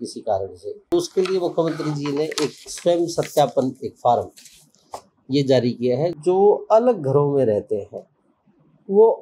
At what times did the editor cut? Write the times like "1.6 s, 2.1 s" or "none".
0.9 s, 6.1 s